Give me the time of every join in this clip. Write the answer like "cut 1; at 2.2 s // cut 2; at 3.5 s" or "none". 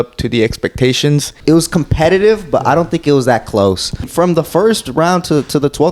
cut 1; at 1.3 s // cut 2; at 4.1 s